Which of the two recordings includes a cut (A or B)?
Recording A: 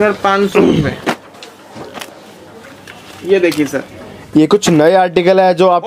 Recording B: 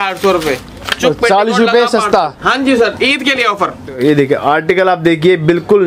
B